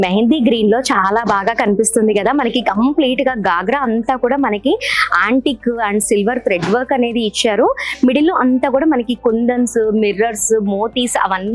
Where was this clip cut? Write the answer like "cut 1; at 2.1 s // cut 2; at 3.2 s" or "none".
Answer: none